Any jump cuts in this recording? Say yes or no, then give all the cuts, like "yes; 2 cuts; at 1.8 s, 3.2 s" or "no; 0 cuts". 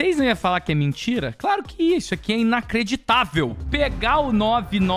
yes; 1 cut; at 3.6 s